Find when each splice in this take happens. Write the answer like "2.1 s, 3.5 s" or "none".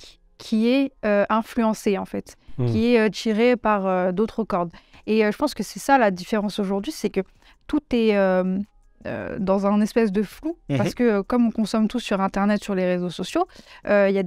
none